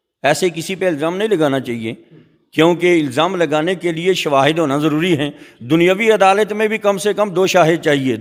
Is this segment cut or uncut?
uncut